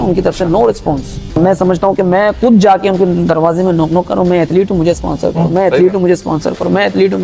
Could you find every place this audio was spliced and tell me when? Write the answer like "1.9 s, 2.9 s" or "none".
1.4 s